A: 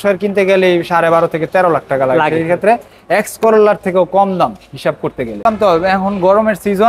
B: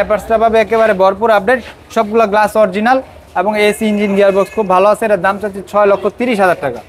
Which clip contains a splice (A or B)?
A